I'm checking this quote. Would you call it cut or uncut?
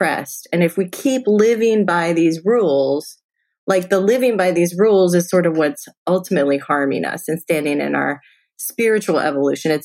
uncut